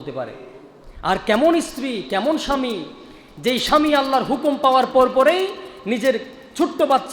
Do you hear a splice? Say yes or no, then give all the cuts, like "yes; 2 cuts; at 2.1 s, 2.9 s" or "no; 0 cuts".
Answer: no; 0 cuts